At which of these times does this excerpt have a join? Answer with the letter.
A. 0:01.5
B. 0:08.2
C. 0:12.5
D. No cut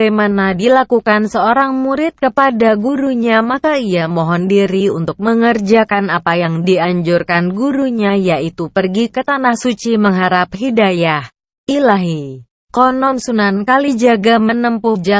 A